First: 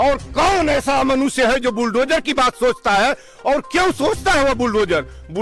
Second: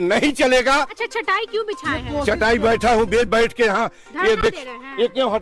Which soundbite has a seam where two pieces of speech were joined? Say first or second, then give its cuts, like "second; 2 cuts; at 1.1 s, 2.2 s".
second; 1 cut; at 1.0 s